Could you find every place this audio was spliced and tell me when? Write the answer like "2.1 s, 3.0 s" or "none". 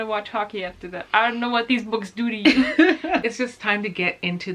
3.2 s